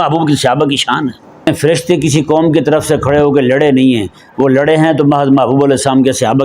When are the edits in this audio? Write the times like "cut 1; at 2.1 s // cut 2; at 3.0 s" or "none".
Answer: cut 1; at 1.5 s